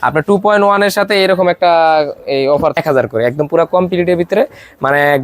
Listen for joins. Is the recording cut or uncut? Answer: cut